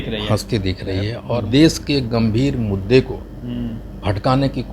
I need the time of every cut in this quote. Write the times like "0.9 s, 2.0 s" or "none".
1.2 s